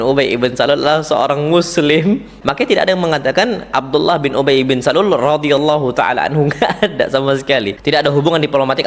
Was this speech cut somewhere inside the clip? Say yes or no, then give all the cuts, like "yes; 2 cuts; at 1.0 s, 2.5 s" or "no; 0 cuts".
yes; 2 cuts; at 2.4 s, 7.7 s